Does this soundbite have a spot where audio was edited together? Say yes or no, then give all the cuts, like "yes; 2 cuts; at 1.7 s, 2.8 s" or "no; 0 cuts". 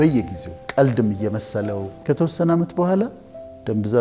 yes; 1 cut; at 1.9 s